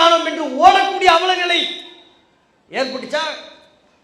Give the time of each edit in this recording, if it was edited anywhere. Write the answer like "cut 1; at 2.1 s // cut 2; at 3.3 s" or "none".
none